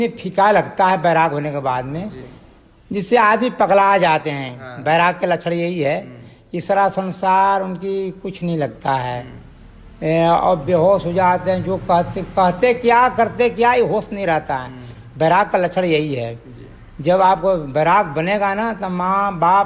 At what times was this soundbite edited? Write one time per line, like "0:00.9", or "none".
none